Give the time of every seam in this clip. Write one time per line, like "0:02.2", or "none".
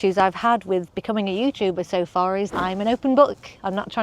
0:02.5